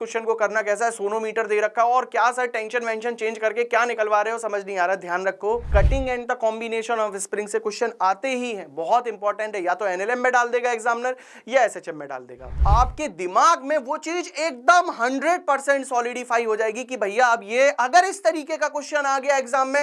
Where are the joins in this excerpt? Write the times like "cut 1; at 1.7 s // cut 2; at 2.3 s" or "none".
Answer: cut 1; at 5.7 s // cut 2; at 12.6 s